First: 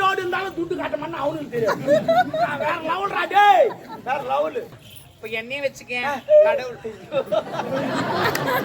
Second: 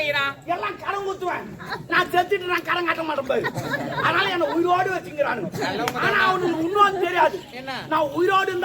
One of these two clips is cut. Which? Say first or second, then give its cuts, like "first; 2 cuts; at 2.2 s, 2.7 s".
first; 1 cut; at 4.8 s